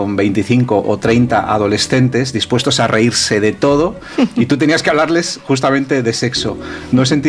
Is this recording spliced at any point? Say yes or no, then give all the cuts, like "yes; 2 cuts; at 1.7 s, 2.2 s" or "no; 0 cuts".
no; 0 cuts